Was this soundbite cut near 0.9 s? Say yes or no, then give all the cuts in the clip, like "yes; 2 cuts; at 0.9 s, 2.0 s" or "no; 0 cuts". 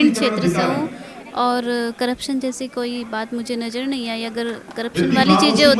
no; 0 cuts